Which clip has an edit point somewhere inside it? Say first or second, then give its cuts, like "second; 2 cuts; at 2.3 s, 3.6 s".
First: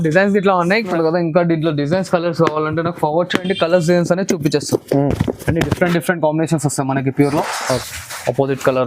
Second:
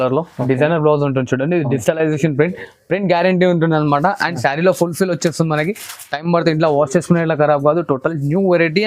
first; 2 cuts; at 0.9 s, 7.8 s